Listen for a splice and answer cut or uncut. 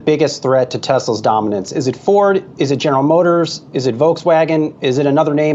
uncut